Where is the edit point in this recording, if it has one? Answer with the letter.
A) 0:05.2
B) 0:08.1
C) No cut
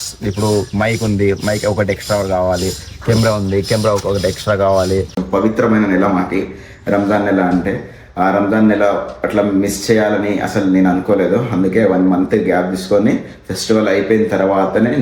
A